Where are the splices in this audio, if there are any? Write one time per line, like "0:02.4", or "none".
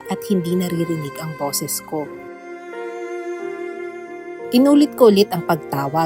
0:04.5